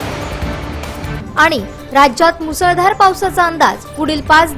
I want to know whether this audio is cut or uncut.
cut